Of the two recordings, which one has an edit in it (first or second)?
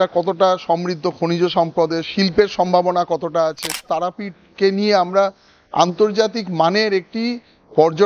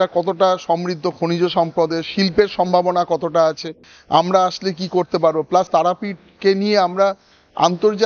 first